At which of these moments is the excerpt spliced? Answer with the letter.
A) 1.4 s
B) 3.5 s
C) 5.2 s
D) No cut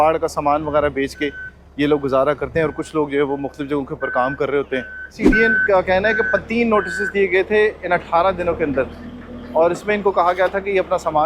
C